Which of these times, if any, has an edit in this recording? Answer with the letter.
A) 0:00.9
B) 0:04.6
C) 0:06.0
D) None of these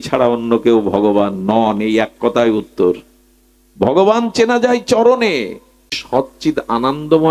C